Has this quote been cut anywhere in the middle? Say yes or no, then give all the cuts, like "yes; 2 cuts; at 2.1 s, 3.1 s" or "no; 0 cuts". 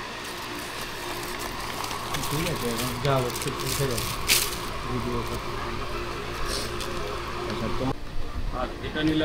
yes; 1 cut; at 7.9 s